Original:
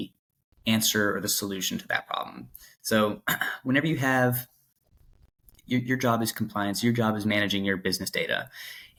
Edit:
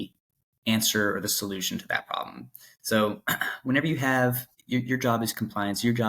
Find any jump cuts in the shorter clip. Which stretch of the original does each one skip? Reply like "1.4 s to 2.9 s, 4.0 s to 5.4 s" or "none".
4.5 s to 5.5 s